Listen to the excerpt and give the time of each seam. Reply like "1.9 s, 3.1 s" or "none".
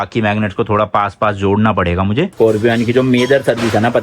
2.3 s

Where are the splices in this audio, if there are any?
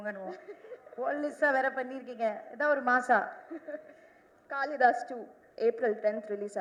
none

